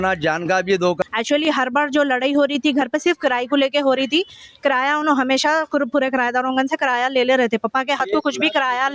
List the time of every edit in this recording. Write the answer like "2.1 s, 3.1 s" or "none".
1.5 s

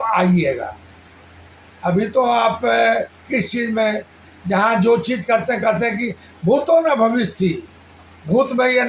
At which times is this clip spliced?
none

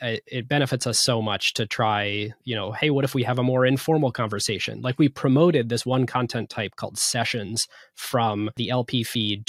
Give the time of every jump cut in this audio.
8.6 s

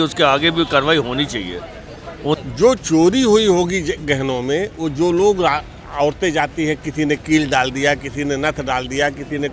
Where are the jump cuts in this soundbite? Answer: 2.4 s

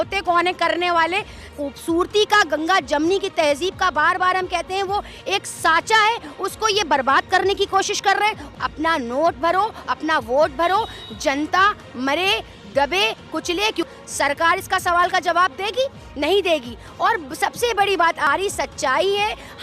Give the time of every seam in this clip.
1.5 s, 8.5 s, 13.9 s, 18.3 s

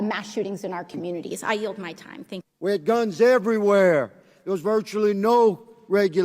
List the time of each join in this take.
2.5 s

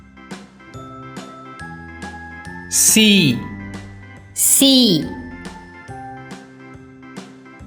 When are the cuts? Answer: 2.6 s, 5.1 s

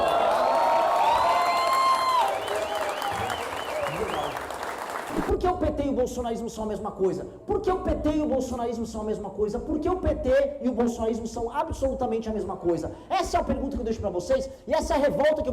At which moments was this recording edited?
5.2 s

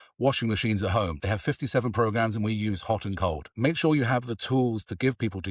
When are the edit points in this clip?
1.2 s, 3.5 s

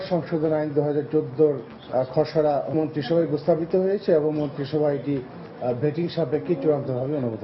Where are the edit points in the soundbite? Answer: 1.7 s, 2.7 s

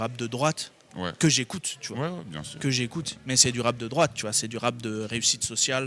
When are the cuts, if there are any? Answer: none

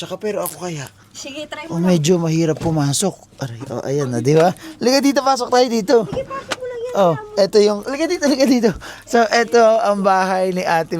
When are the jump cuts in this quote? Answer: none

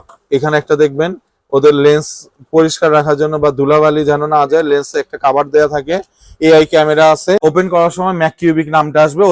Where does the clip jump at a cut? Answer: 7.4 s

